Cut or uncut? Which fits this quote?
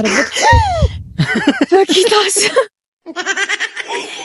uncut